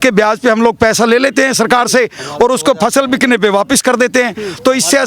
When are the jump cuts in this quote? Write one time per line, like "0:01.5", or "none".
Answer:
none